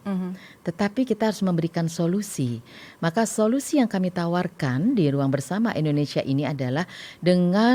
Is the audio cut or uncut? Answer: uncut